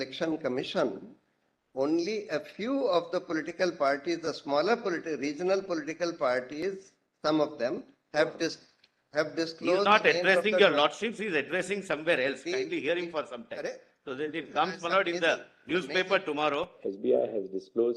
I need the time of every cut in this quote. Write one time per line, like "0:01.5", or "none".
0:16.8